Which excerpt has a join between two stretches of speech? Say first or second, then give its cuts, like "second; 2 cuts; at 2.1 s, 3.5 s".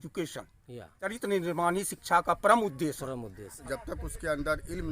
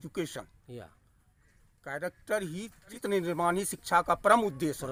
first; 2 cuts; at 1.0 s, 3.6 s